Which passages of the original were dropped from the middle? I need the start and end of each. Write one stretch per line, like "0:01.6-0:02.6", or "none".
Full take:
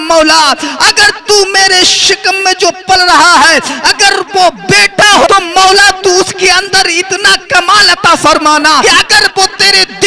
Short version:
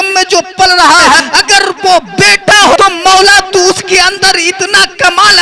0:03.5-0:03.7